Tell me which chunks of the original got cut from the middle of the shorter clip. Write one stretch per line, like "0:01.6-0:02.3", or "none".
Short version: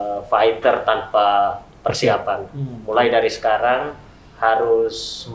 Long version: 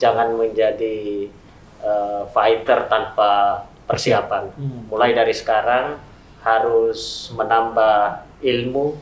none